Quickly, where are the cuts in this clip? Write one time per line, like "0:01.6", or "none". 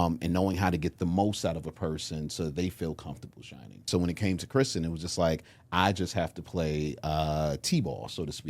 0:03.9